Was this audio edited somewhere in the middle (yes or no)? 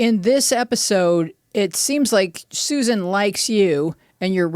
yes